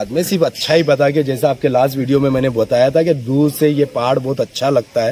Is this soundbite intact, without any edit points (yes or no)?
yes